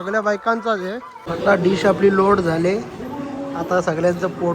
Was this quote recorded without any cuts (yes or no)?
no